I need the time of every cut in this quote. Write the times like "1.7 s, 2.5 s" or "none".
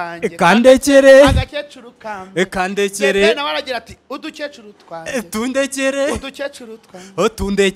none